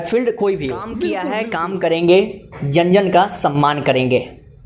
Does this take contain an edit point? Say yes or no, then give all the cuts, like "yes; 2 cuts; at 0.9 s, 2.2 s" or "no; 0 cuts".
yes; 1 cut; at 1.3 s